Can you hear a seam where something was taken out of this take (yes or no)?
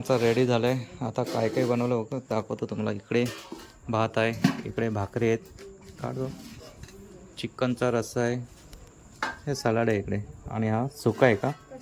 no